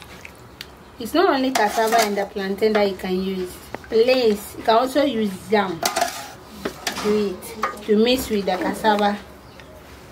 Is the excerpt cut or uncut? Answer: uncut